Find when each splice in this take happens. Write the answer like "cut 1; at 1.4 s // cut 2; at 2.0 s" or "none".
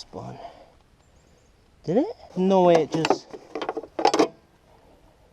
cut 1; at 2.2 s